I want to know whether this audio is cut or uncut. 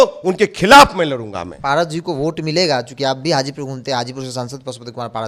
uncut